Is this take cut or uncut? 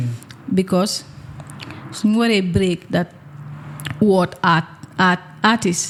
uncut